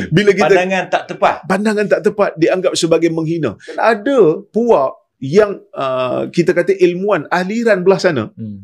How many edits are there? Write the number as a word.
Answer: one